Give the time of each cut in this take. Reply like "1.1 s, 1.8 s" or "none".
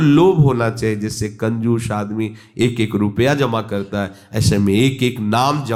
none